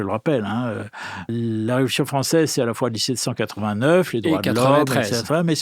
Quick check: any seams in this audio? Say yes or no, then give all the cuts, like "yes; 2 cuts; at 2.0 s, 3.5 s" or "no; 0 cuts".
yes; 1 cut; at 1.2 s